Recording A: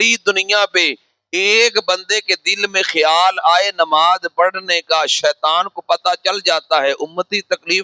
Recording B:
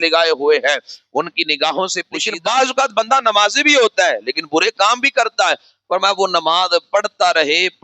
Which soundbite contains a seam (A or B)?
B